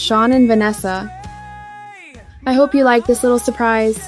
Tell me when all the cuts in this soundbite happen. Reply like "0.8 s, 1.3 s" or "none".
1.1 s, 2.3 s